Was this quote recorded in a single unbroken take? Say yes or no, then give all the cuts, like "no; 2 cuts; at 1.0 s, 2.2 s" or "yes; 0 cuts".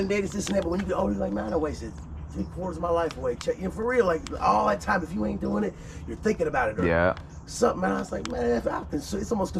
yes; 0 cuts